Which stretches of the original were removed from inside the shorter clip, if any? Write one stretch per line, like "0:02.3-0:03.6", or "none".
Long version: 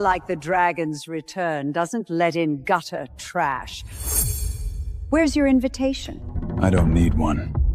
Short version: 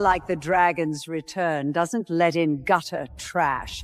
none